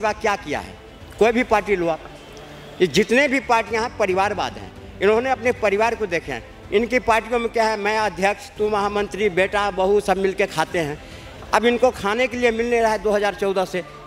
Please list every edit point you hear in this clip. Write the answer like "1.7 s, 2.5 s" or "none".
none